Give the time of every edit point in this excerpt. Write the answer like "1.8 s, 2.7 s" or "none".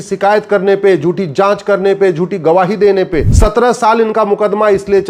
3.3 s